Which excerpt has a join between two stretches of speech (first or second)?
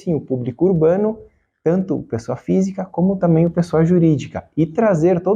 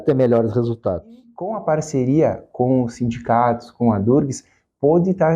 second